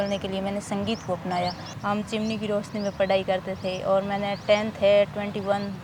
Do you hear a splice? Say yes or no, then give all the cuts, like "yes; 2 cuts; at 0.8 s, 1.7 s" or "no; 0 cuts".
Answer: yes; 1 cut; at 1.7 s